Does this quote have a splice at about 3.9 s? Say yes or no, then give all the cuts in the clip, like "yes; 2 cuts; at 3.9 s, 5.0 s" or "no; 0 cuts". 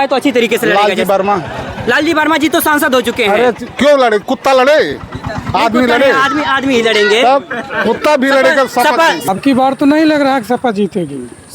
no; 1 cut; at 9.2 s